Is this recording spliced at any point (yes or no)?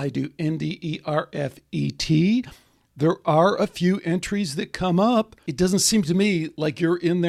yes